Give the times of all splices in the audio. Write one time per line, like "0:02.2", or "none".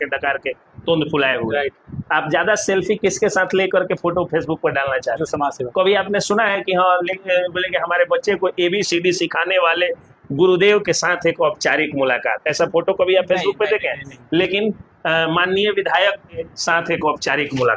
0:16.5